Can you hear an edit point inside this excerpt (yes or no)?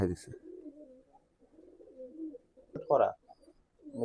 yes